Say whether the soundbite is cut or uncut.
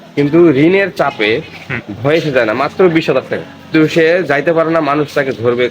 cut